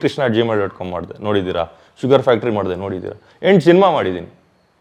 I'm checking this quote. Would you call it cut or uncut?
uncut